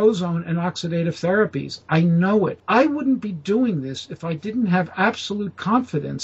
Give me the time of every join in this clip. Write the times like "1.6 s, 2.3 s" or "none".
2.6 s